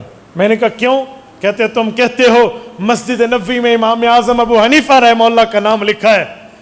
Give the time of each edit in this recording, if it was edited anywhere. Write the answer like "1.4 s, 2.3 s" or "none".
none

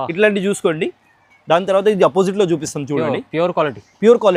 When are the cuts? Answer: none

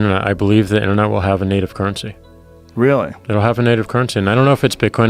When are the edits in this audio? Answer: none

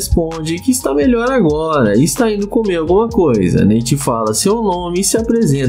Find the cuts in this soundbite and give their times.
none

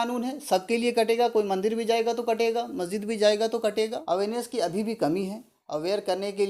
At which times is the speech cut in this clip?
4.0 s

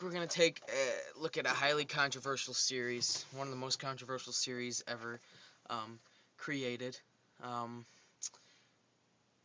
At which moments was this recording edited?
2.2 s

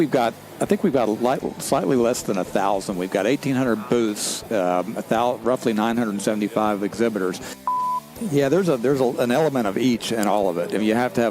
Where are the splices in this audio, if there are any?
7.9 s

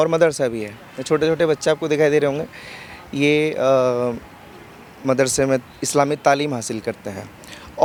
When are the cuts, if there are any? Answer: none

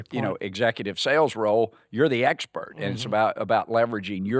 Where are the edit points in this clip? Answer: none

